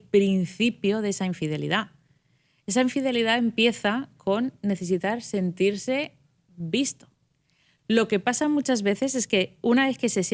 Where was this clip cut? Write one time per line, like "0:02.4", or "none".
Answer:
none

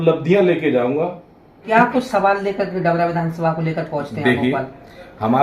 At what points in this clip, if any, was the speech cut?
0:01.6

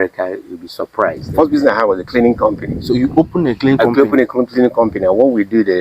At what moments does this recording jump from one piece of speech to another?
0:01.2

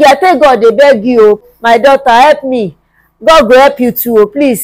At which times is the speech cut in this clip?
0:01.4

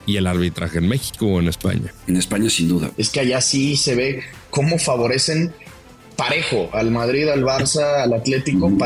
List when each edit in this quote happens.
0:01.9
0:03.0

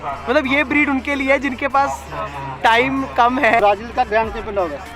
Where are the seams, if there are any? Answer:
0:03.6

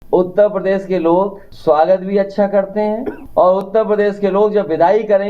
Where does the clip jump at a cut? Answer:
0:01.4
0:03.2

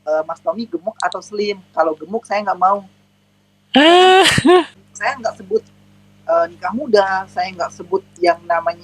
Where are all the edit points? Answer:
0:04.8

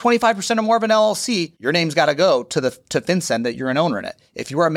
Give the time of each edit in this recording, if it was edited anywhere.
0:01.5

